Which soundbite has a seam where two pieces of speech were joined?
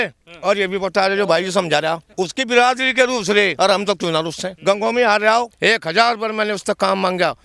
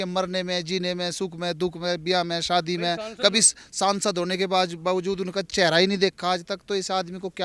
first; 4 cuts; at 2.1 s, 3.5 s, 4.5 s, 5.5 s

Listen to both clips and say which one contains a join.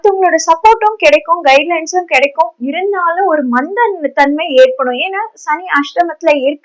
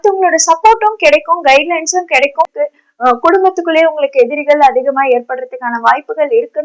second; 1 cut; at 2.5 s

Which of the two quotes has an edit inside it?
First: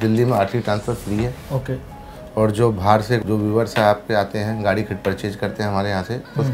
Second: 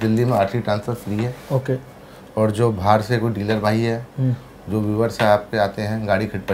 first; 1 cut; at 3.2 s

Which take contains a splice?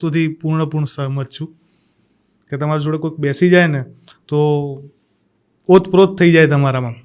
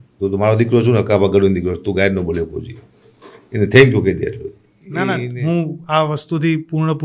second; 1 cut; at 5.2 s

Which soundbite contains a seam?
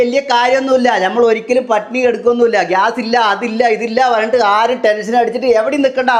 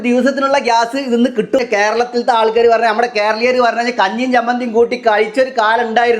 second; 1 cut; at 1.6 s

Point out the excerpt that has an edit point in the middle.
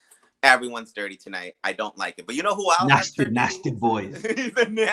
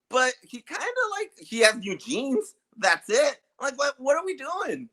second; 1 cut; at 1.4 s

